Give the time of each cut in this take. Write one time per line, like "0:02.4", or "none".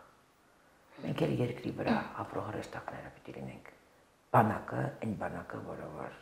none